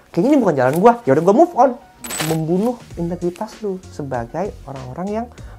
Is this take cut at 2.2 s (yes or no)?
yes